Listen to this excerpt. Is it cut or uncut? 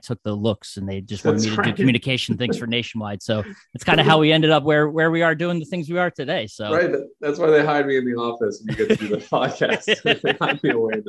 uncut